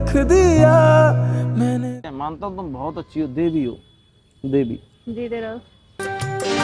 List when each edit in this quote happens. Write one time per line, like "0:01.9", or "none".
0:02.0